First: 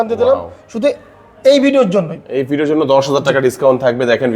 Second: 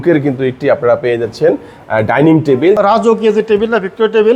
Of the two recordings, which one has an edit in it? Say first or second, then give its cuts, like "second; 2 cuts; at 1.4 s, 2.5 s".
second; 1 cut; at 2.8 s